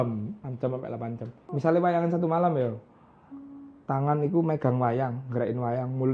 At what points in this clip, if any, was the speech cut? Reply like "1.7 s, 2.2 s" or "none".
1.4 s